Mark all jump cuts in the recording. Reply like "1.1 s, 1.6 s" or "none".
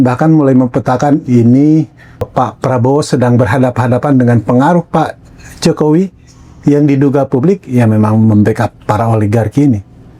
2.3 s